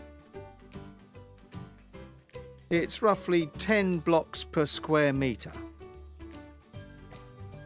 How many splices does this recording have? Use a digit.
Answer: 0